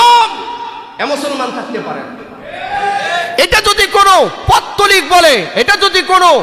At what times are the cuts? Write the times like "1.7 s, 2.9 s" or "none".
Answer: none

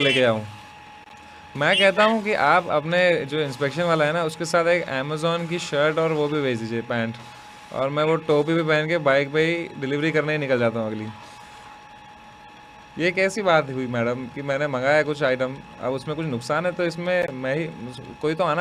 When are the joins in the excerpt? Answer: none

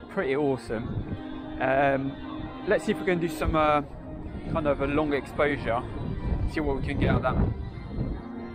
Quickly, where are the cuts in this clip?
none

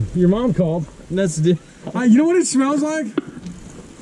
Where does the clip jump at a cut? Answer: 1.8 s

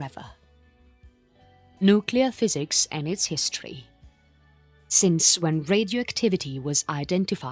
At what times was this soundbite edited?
6.6 s

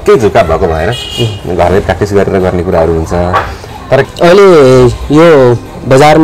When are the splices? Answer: 4.0 s

